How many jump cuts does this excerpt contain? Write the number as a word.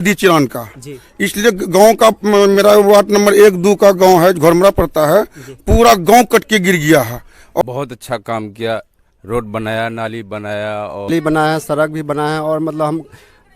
two